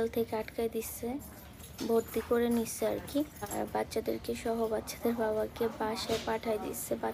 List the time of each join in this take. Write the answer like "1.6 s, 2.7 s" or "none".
1.6 s, 3.5 s